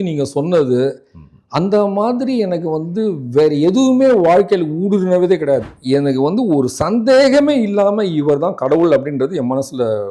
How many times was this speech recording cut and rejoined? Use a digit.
1